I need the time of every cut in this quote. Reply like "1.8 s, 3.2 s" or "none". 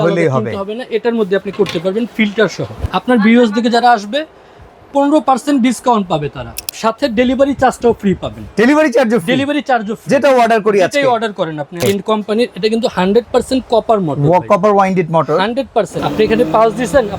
2.9 s, 6.5 s, 11.8 s, 16.0 s